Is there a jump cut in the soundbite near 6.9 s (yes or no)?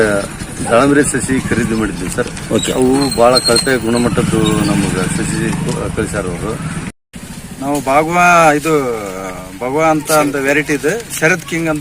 yes